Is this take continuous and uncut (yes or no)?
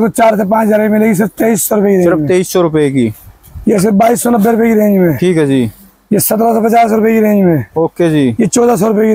yes